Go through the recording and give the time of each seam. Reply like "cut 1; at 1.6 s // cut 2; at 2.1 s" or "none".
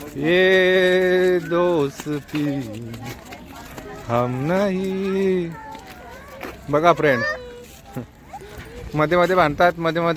none

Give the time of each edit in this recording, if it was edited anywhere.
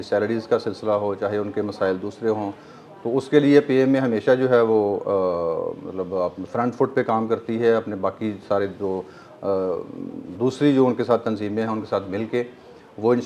none

